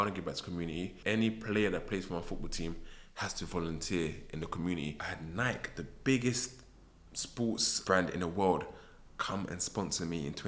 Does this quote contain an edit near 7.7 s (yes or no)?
yes